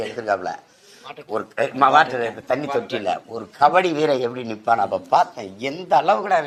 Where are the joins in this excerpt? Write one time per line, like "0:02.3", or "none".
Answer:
none